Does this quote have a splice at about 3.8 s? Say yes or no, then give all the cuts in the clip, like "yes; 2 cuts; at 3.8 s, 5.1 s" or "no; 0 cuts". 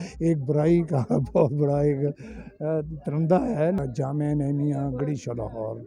yes; 1 cut; at 3.8 s